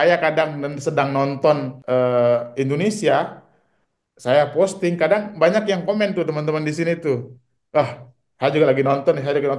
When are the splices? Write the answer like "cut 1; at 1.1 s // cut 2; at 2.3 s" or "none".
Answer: cut 1; at 1.7 s